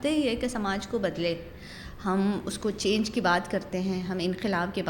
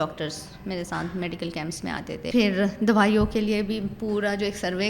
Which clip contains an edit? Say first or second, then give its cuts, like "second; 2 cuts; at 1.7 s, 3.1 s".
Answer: second; 1 cut; at 2.2 s